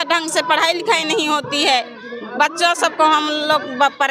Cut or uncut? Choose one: uncut